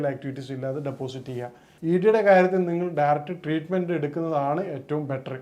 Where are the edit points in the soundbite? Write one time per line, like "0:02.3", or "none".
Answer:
0:01.6